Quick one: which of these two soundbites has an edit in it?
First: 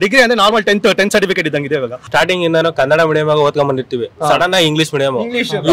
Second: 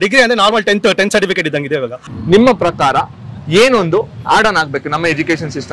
first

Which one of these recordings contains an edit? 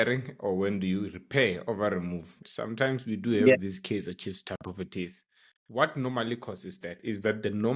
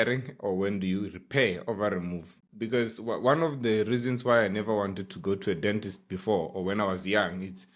first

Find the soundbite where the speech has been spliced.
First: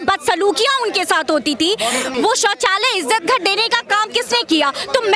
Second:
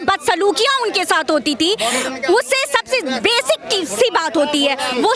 first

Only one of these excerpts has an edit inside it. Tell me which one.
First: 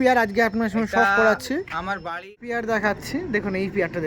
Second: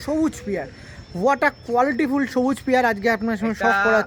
first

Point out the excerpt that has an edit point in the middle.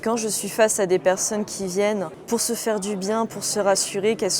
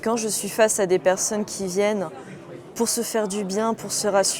first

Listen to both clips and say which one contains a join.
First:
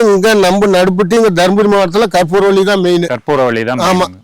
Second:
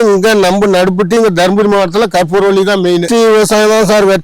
second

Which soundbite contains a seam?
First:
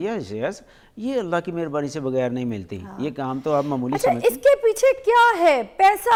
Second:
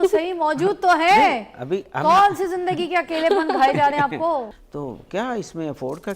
second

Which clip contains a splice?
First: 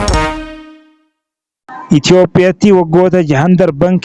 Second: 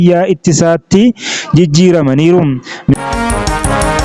second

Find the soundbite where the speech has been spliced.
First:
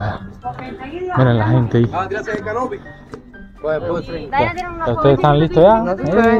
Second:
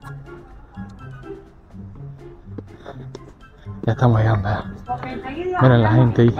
first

